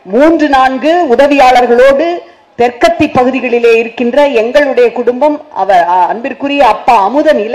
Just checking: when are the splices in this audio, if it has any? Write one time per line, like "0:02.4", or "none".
none